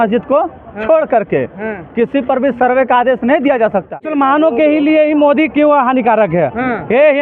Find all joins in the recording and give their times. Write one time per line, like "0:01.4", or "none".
0:04.1

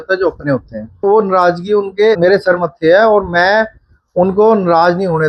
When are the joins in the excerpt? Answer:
0:01.0
0:02.2

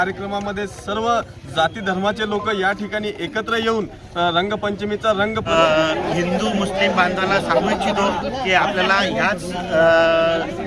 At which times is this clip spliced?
0:05.5

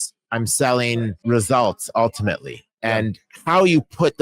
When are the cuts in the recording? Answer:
0:01.1

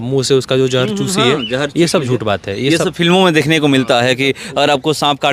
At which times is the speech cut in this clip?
none

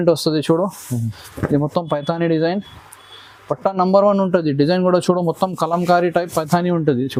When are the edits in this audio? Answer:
none

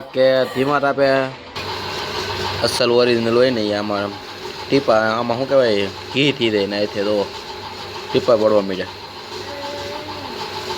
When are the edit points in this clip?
0:01.2

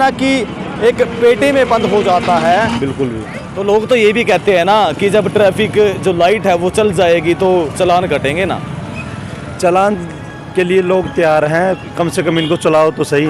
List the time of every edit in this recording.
0:02.8

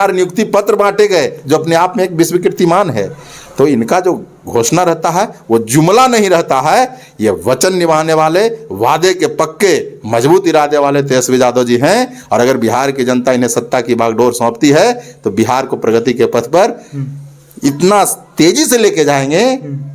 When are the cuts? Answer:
none

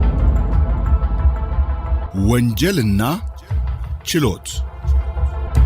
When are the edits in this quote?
0:02.0

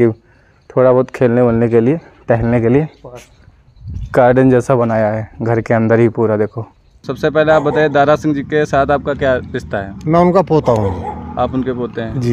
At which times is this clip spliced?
0:07.1

